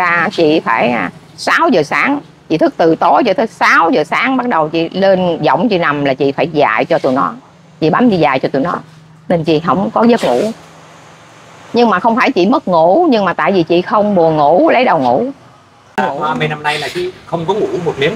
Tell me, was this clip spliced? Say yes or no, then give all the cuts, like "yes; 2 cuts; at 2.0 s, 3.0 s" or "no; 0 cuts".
yes; 1 cut; at 16.0 s